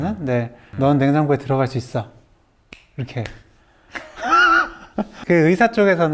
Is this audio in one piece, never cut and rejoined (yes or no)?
no